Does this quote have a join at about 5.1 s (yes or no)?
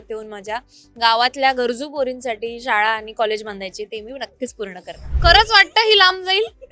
yes